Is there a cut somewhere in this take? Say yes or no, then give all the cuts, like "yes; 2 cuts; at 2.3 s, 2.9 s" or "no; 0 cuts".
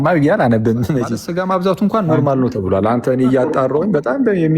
yes; 1 cut; at 1.2 s